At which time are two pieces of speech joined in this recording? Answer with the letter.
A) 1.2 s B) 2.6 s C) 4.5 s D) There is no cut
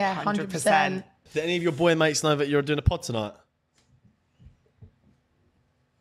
A